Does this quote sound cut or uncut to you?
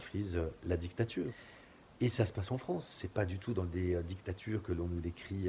cut